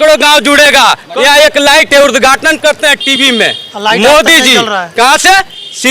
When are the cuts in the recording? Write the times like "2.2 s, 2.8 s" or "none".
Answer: 1.0 s